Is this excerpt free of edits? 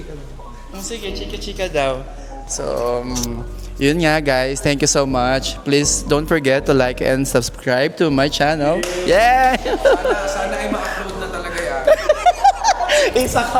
yes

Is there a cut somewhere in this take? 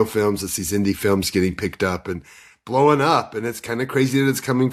no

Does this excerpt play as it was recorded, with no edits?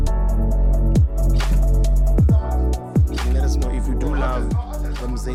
yes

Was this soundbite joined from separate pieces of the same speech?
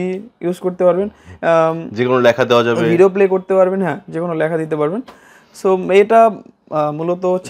no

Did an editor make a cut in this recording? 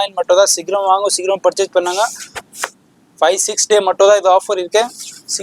no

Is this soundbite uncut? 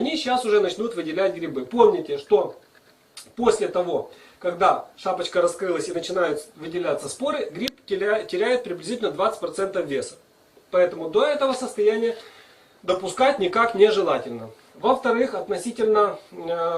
no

